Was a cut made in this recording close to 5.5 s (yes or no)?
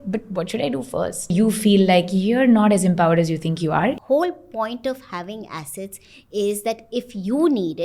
no